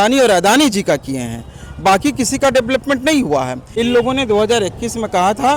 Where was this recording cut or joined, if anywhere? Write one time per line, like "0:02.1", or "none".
0:03.6